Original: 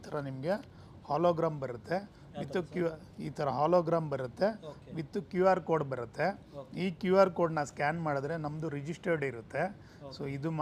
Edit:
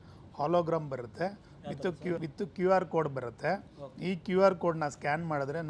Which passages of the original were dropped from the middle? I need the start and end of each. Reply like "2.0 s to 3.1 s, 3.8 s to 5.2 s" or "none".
3.0 s to 5.0 s